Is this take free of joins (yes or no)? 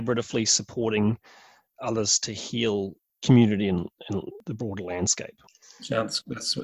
yes